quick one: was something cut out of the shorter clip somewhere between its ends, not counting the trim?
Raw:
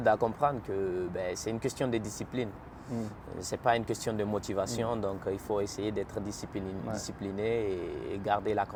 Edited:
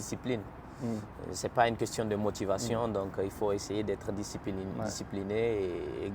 no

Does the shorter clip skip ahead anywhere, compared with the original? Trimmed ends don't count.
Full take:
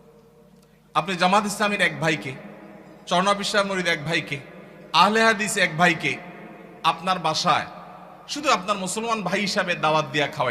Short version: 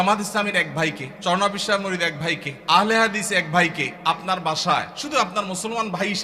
yes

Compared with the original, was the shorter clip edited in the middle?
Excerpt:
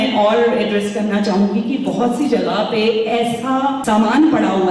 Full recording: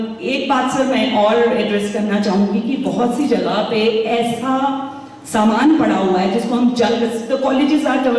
yes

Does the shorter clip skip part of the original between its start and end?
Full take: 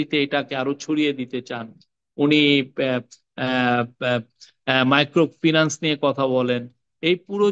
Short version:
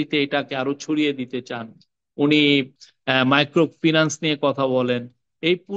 yes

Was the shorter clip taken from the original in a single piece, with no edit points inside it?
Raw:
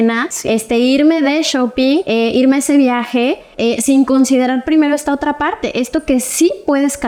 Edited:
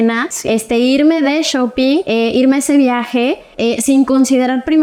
yes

